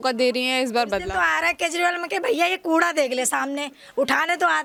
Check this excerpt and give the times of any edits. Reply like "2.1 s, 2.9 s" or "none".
none